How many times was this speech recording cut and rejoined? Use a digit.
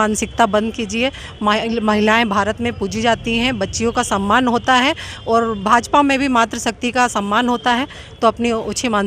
0